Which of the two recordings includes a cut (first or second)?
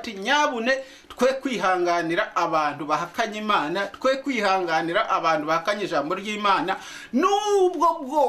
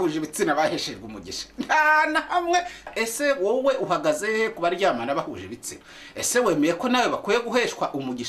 second